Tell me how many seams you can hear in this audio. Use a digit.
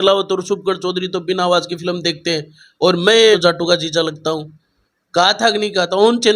1